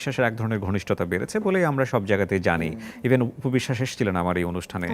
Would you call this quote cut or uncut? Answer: uncut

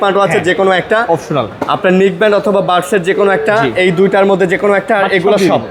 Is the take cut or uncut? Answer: uncut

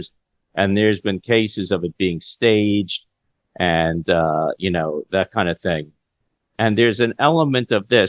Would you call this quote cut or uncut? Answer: uncut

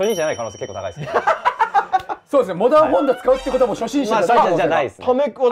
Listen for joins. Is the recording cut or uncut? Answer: uncut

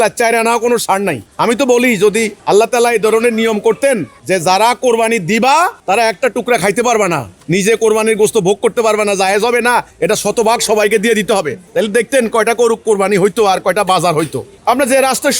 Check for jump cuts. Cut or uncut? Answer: cut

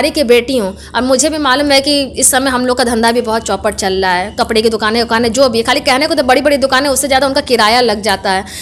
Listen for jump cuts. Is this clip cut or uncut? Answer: uncut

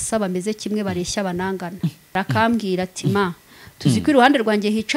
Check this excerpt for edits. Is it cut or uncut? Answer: cut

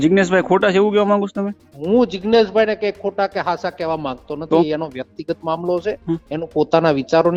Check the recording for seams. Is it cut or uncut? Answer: uncut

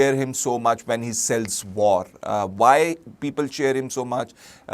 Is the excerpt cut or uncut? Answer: uncut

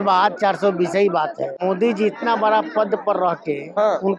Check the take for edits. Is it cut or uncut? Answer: cut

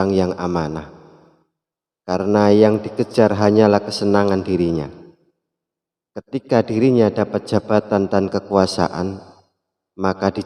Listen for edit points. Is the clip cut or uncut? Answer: uncut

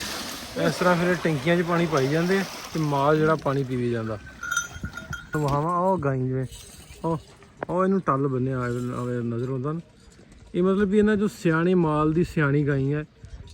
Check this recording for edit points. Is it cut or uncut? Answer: cut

